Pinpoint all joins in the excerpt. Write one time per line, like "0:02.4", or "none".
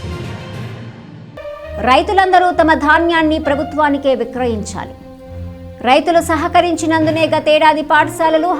0:01.2